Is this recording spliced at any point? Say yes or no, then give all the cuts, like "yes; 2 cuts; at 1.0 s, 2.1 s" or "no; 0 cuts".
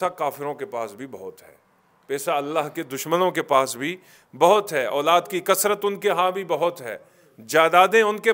no; 0 cuts